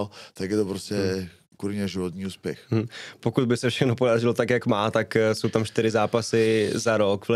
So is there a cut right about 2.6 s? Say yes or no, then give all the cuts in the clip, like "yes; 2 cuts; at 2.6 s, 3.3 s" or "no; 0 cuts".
no; 0 cuts